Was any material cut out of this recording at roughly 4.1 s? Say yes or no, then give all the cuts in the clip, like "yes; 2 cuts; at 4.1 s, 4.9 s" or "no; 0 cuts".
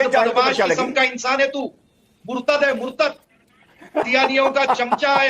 yes; 1 cut; at 4.1 s